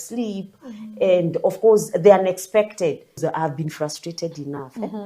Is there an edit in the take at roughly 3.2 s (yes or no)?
yes